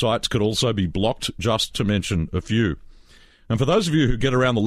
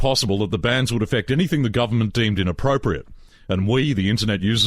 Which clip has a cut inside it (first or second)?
second